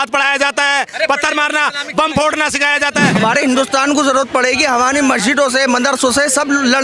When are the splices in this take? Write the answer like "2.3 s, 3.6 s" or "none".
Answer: 3.2 s